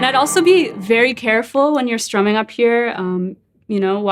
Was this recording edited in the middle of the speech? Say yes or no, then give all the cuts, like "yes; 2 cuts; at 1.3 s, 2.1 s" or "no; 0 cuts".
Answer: no; 0 cuts